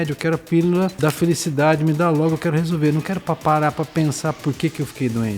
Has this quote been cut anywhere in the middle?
yes; 1 cut; at 0.9 s

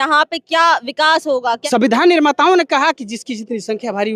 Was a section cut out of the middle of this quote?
yes; 1 cut; at 1.6 s

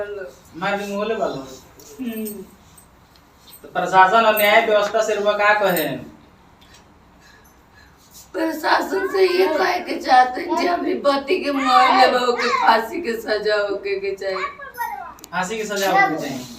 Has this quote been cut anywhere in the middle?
no; 0 cuts

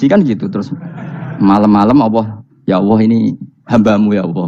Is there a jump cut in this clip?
no; 0 cuts

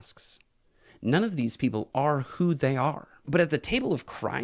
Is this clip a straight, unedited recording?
no; 1 cut; at 3.2 s

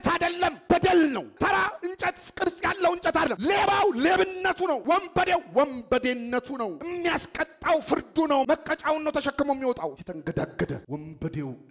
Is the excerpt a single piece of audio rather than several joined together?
no; 1 cut; at 1.3 s

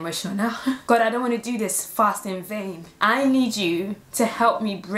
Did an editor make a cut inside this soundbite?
yes; 3 cuts; at 0.8 s, 2.9 s, 4.0 s

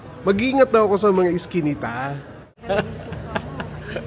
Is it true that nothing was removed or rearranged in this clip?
no; 1 cut; at 2.6 s

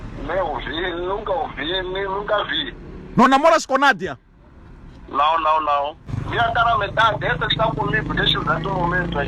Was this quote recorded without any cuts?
no; 1 cut; at 6.0 s

